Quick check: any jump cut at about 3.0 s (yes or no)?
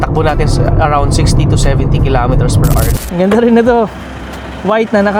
yes